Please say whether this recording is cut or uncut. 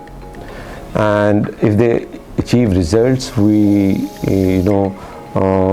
uncut